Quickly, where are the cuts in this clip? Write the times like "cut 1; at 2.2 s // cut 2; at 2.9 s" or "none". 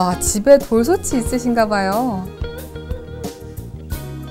cut 1; at 2.2 s